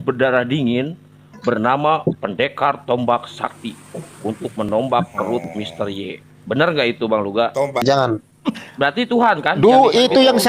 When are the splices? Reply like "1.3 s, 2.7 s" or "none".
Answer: 7.8 s